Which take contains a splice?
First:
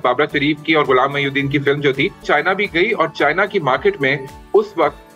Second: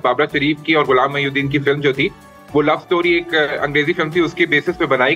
first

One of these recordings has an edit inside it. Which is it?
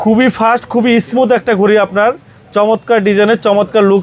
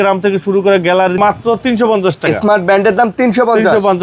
second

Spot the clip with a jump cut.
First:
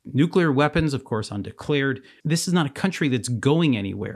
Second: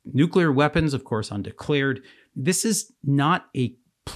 first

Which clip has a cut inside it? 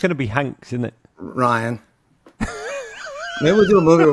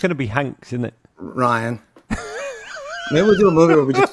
second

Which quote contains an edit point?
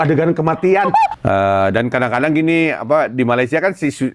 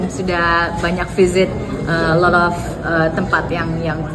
first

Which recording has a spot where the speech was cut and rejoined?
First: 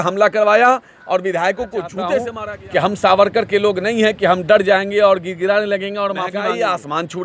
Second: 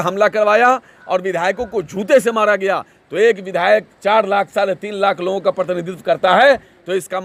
first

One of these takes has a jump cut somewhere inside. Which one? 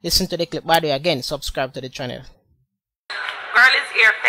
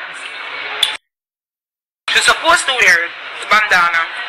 first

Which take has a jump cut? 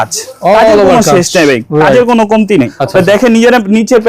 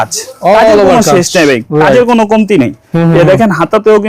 first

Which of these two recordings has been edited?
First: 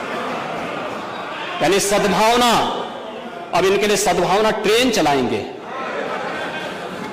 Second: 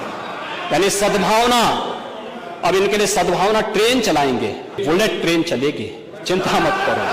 second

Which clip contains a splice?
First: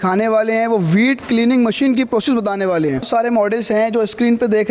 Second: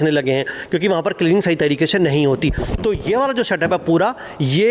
first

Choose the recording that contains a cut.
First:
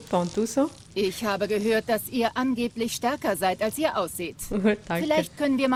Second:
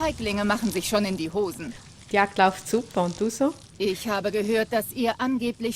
second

